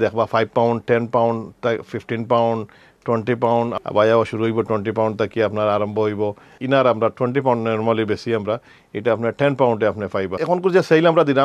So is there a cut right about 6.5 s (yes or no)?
yes